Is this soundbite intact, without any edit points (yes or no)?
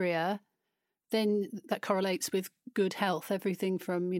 no